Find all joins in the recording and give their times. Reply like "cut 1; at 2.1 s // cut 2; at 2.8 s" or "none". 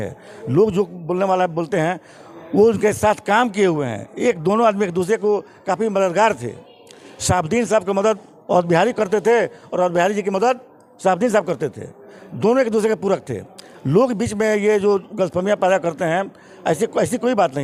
none